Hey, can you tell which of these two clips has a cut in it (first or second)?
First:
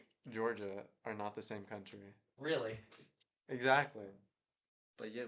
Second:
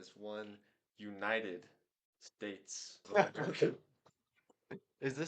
second